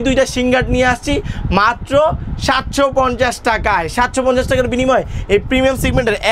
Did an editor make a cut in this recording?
no; 0 cuts

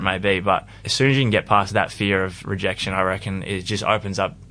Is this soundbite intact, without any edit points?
no; 1 cut; at 1.7 s

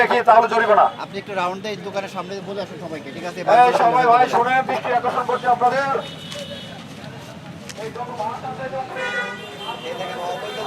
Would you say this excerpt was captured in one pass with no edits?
yes; 0 cuts

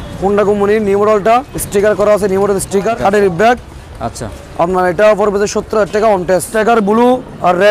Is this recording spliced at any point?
yes; 3 cuts; at 1.6 s, 2.9 s, 6.5 s

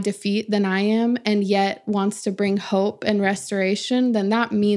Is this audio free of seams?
yes; 0 cuts

